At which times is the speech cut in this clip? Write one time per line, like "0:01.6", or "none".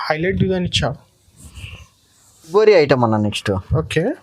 0:02.5